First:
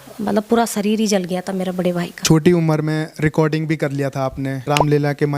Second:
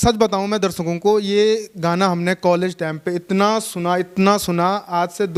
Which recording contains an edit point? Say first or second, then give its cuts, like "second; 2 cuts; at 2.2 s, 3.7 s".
first; 2 cuts; at 2.2 s, 4.6 s